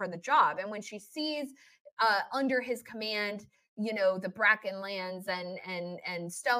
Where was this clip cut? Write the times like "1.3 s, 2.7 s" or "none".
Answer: none

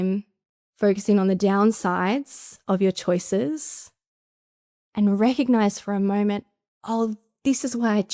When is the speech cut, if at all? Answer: none

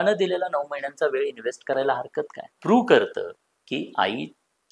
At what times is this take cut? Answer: 2.6 s

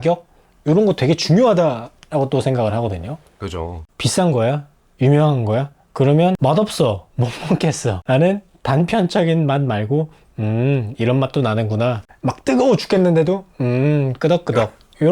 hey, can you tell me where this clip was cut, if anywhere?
3.7 s, 6.4 s, 7.9 s, 12.1 s

